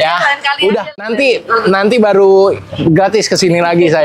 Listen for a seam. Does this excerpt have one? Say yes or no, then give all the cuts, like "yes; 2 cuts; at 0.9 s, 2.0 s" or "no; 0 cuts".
yes; 1 cut; at 1.1 s